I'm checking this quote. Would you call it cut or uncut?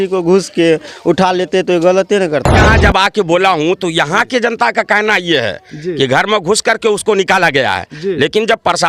cut